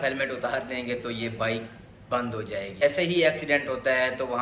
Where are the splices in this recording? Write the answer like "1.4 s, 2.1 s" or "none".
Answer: 2.8 s